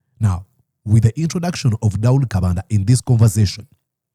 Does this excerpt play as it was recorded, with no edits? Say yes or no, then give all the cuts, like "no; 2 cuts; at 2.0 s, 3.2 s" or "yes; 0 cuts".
yes; 0 cuts